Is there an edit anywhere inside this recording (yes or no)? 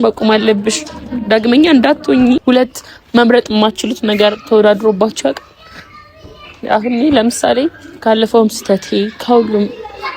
yes